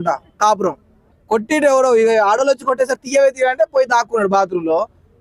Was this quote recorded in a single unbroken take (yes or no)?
no